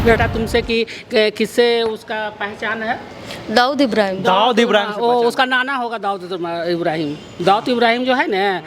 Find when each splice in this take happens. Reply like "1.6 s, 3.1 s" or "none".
none